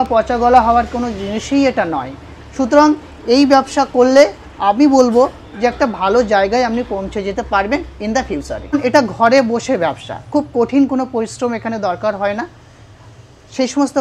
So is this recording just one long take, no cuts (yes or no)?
no